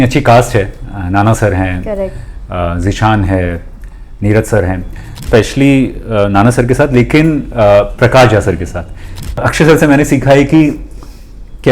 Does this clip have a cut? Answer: yes; 2 cuts; at 5.2 s, 9.5 s

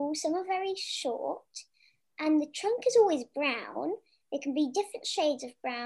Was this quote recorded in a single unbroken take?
yes; 0 cuts

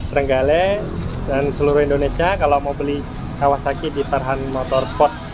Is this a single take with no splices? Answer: yes; 0 cuts

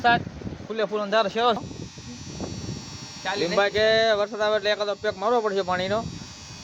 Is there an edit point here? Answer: yes; 1 cut; at 1.6 s

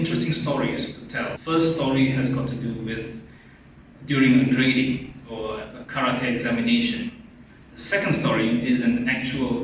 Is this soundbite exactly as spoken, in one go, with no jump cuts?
no; 1 cut; at 1.3 s

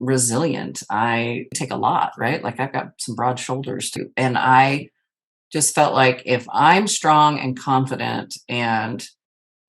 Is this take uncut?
no; 2 cuts; at 1.6 s, 4.0 s

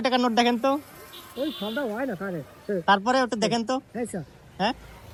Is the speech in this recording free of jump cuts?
yes; 0 cuts

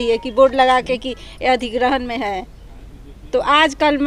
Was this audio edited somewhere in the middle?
no; 0 cuts

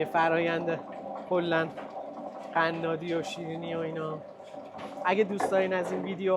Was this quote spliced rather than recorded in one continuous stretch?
no; 0 cuts

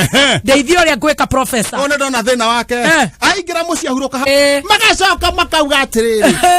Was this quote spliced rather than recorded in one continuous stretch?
yes; 1 cut; at 4.3 s

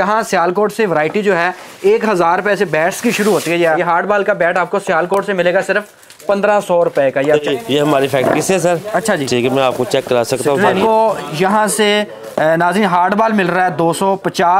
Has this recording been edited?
yes; 3 cuts; at 3.8 s, 7.5 s, 10.8 s

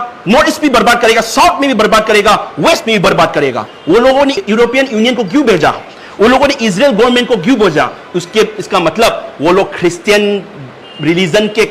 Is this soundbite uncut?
no; 1 cut; at 3.7 s

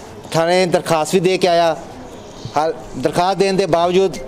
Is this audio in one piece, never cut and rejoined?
yes; 0 cuts

